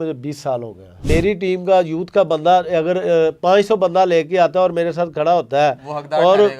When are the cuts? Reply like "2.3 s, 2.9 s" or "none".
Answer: 1.0 s